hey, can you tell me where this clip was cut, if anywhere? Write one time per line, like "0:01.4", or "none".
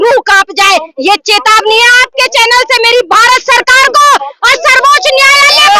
none